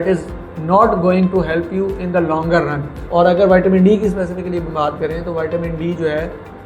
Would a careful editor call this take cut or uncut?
cut